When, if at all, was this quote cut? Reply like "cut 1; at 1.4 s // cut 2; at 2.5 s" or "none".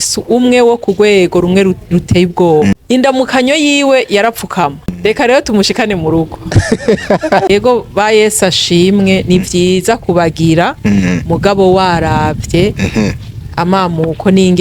cut 1; at 2.7 s // cut 2; at 5.0 s // cut 3; at 7.5 s